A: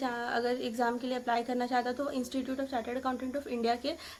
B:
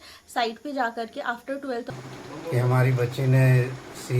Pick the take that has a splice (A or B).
B